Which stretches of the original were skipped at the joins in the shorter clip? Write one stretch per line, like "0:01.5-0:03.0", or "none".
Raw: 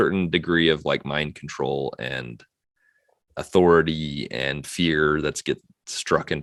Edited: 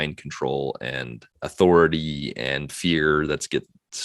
0:02.4-0:03.2